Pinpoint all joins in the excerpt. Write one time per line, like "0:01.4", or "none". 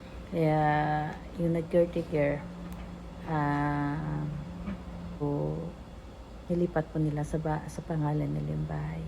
0:05.2

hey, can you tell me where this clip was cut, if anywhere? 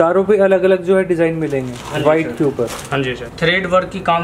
0:03.2

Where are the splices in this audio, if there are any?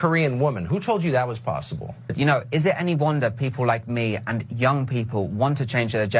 0:02.1

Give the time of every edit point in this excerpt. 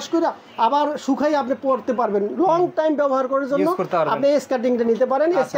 none

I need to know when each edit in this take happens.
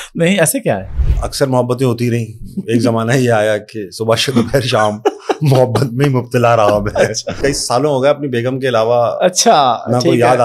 0:00.9
0:07.4

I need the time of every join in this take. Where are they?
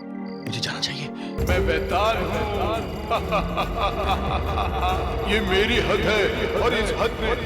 0:01.4

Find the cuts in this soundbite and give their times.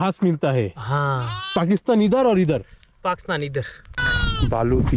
0:01.3
0:03.9

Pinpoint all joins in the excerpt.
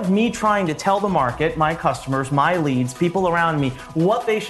none

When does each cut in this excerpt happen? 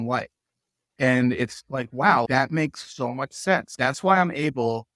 0:00.9
0:02.3
0:03.7

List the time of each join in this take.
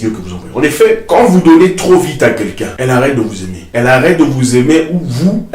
0:01.0
0:02.7
0:03.5

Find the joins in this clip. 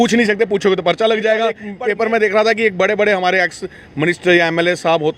0:01.7

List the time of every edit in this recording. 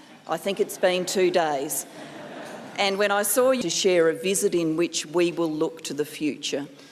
none

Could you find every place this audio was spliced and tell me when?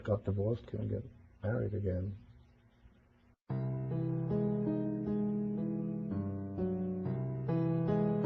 0:01.7

